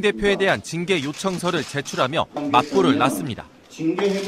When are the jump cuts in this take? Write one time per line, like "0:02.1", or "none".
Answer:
0:02.6